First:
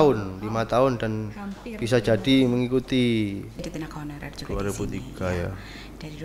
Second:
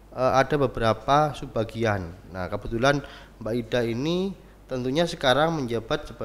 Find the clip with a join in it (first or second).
first